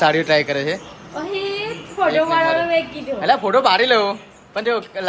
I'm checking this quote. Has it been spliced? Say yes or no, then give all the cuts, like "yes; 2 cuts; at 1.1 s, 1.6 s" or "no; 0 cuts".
no; 0 cuts